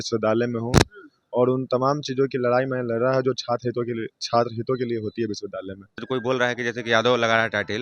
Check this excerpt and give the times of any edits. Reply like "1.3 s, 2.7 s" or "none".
6.0 s